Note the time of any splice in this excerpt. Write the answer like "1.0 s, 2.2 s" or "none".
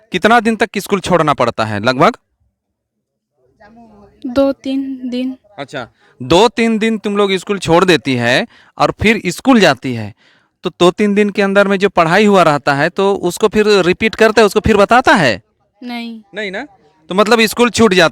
none